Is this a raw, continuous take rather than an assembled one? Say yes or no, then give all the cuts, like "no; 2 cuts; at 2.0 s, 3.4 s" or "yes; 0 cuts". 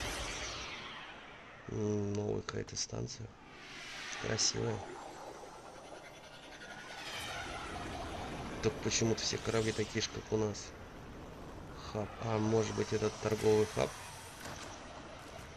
no; 1 cut; at 4.0 s